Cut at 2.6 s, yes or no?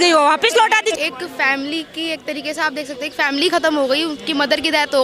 no